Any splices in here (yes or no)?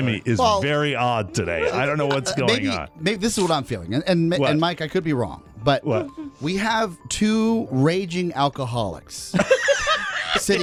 no